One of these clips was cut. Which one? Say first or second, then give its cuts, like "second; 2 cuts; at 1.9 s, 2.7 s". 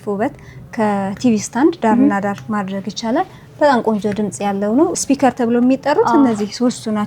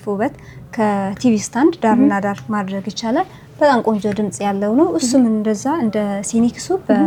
first; 1 cut; at 5.0 s